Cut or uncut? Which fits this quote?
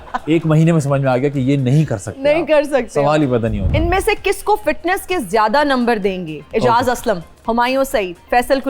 cut